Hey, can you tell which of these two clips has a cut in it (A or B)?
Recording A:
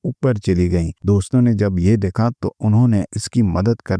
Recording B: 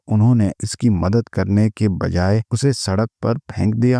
A